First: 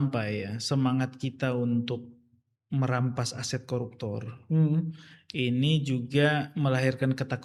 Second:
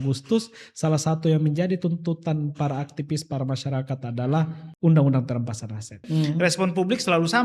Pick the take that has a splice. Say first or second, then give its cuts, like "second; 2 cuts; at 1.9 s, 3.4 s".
second; 2 cuts; at 4.6 s, 6.0 s